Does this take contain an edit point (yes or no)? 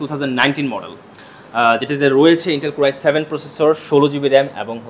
no